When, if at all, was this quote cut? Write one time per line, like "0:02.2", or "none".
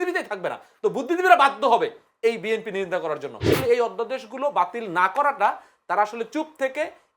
0:03.5